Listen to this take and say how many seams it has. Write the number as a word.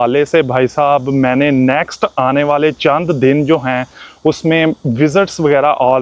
zero